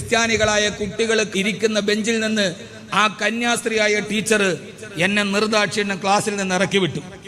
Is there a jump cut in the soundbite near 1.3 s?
yes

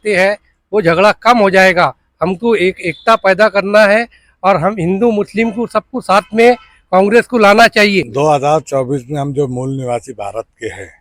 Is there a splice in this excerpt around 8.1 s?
yes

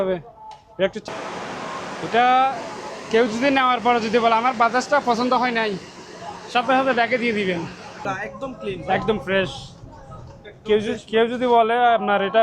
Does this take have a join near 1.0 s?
yes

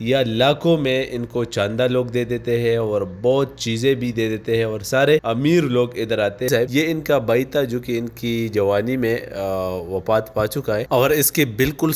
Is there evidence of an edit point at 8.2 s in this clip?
no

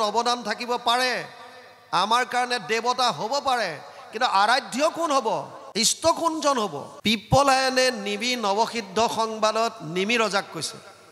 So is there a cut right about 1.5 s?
no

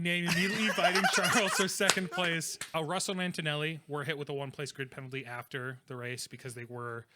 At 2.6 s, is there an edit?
yes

